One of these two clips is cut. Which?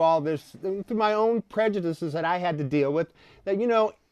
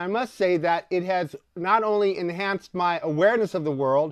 first; 1 cut; at 2.0 s

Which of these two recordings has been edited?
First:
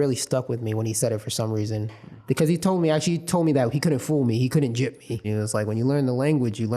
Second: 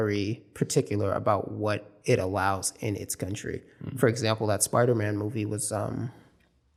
first; 1 cut; at 5.3 s

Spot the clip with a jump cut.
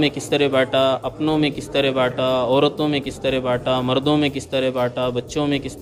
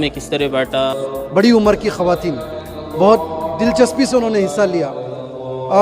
second; 1 cut; at 1.0 s

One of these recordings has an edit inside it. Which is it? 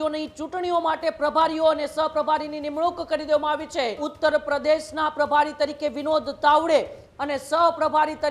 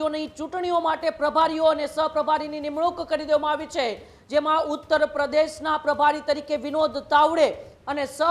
first; 1 cut; at 4.1 s

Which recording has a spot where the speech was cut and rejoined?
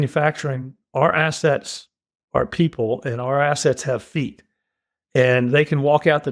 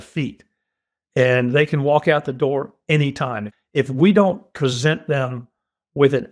second; 1 cut; at 3.5 s

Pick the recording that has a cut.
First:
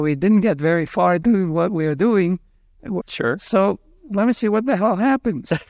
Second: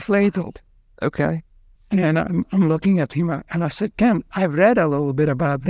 first; 2 cuts; at 1.2 s, 3.0 s

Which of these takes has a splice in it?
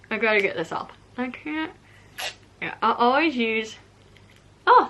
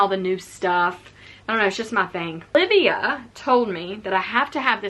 second; 1 cut; at 2.5 s

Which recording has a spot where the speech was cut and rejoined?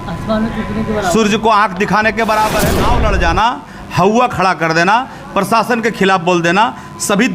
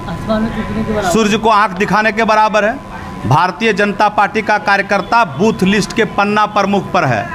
first; 1 cut; at 2.9 s

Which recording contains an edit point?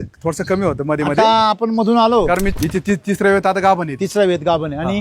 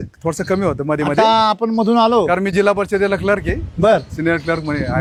first; 1 cut; at 2.5 s

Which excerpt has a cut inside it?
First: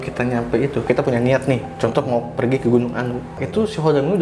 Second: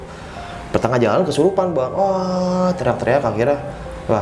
first; 1 cut; at 3.3 s

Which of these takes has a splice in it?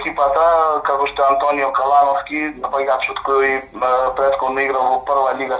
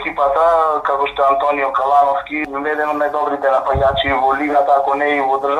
second; 1 cut; at 2.5 s

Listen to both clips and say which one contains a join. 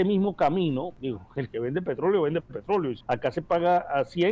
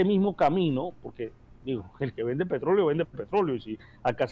first; 2 cuts; at 0.9 s, 3.0 s

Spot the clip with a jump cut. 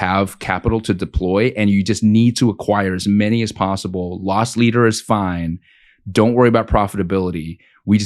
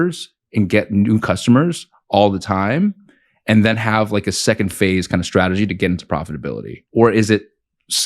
second; 1 cut; at 6.8 s

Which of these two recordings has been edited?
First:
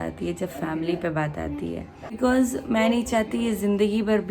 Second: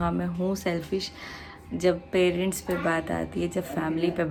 first; 1 cut; at 2.1 s

